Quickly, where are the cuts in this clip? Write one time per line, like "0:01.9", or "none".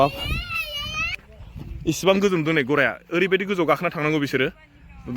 0:01.0